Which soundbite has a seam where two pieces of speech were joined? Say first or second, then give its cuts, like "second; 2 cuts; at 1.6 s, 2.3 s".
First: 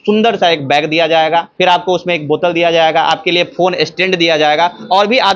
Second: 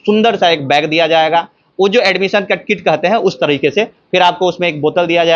first; 1 cut; at 1.5 s